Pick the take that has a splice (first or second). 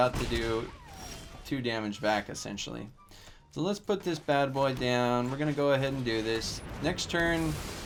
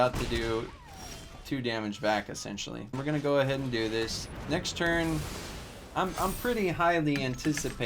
second